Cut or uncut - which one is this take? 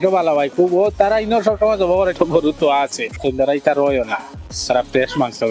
cut